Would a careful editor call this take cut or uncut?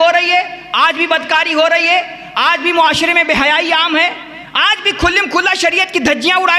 uncut